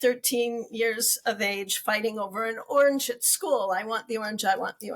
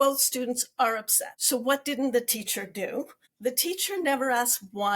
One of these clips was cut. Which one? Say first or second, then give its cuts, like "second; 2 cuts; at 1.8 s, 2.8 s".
second; 1 cut; at 3.3 s